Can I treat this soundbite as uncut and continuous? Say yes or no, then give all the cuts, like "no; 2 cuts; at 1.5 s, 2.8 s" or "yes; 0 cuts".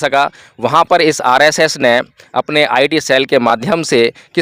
yes; 0 cuts